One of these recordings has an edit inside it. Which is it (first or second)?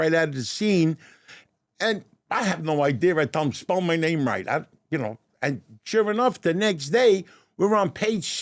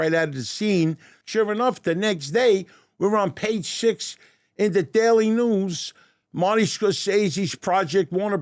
second